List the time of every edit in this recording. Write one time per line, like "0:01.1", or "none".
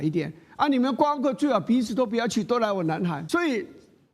0:03.2